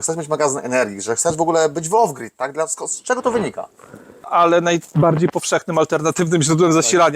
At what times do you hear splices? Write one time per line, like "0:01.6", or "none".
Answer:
0:04.3